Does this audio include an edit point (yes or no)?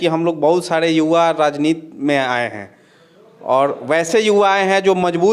no